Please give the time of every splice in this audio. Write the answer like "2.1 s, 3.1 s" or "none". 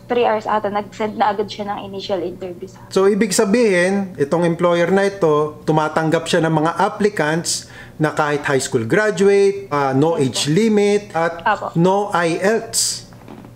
2.7 s, 9.7 s, 11.1 s